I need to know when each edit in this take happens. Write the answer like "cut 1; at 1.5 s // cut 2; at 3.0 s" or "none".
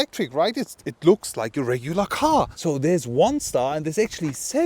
cut 1; at 2.5 s